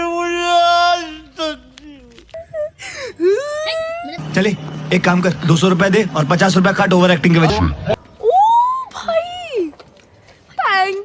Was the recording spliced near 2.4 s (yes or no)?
yes